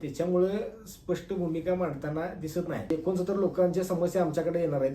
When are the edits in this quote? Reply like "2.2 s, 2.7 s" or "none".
2.9 s